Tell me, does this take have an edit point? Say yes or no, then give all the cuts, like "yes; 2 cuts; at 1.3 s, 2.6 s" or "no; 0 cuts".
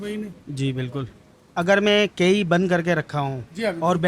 yes; 1 cut; at 1.4 s